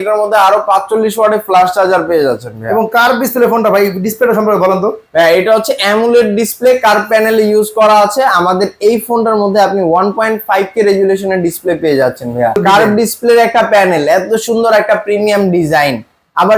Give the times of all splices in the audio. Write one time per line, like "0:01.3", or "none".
0:12.6